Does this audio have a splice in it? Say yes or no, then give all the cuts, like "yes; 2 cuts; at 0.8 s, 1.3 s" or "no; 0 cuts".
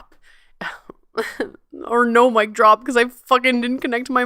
no; 0 cuts